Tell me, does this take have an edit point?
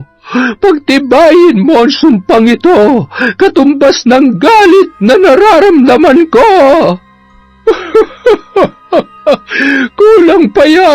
yes; 1 cut; at 7.5 s

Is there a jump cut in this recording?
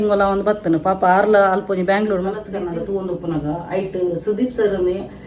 yes; 1 cut; at 2.5 s

